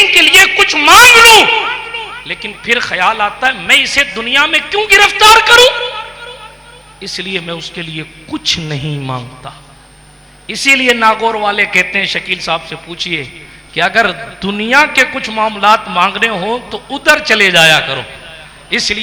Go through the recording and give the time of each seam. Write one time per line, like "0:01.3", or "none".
none